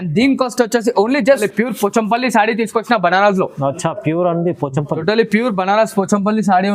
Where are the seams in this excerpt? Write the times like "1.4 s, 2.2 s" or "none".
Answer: 1.4 s

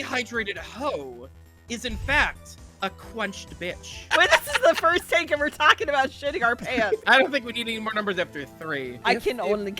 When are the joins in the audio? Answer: 3.9 s, 7.0 s, 9.0 s

